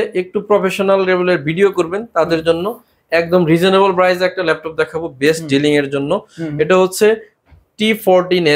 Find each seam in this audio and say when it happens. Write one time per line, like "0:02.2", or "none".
none